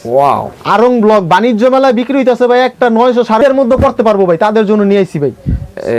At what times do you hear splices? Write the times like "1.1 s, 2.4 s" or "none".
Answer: 3.4 s